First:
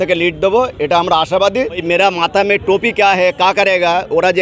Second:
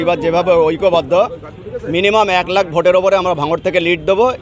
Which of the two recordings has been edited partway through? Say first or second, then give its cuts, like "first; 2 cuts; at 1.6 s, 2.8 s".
first; 1 cut; at 1.8 s